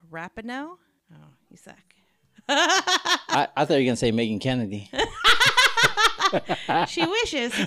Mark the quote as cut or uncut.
cut